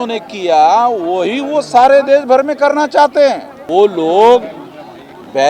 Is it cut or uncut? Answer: cut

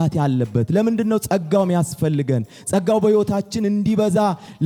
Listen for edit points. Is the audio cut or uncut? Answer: uncut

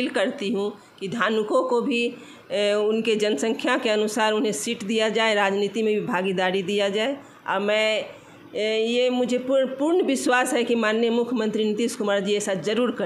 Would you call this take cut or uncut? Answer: uncut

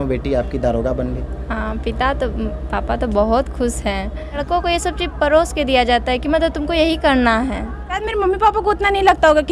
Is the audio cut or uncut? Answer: cut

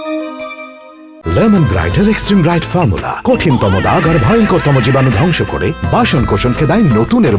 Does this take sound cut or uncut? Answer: cut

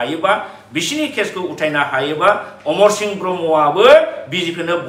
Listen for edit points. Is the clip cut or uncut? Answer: uncut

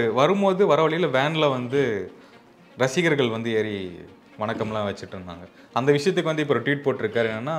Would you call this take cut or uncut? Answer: uncut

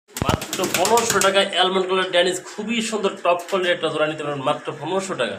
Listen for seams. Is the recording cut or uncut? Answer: uncut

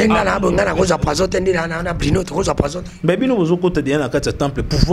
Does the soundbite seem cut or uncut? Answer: uncut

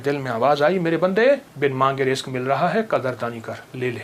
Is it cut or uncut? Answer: cut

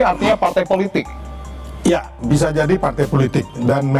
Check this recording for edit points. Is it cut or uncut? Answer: uncut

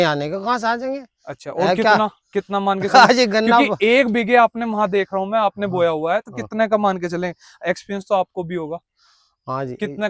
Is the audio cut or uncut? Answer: uncut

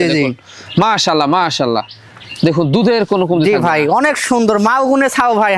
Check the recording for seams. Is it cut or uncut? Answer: uncut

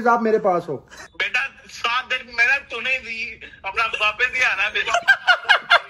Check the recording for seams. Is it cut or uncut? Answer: cut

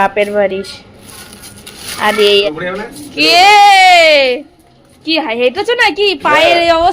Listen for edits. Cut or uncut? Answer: cut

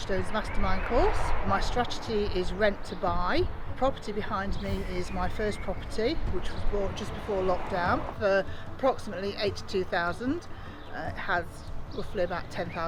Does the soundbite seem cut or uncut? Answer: uncut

